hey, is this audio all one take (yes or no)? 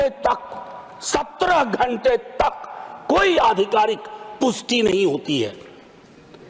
yes